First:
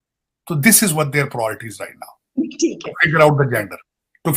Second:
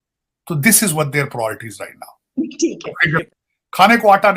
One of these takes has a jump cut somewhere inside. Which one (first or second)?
second